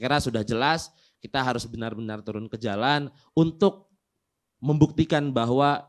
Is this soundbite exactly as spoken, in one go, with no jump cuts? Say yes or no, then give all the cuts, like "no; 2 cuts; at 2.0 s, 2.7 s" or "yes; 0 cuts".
yes; 0 cuts